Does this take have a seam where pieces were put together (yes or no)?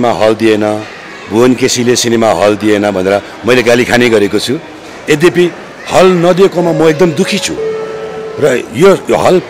no